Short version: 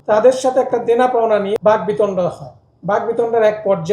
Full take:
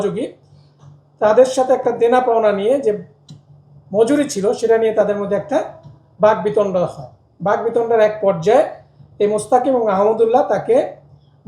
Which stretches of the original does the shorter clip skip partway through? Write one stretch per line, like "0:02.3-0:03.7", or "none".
0:02.7-0:06.1